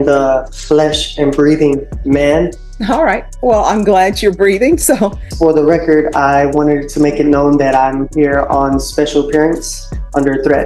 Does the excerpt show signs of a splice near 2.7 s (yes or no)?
yes